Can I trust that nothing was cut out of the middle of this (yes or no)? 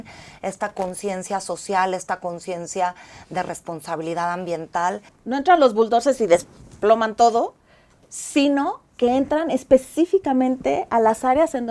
no